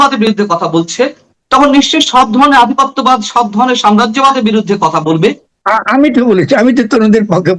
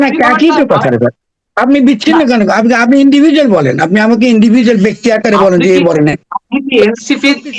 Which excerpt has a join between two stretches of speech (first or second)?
first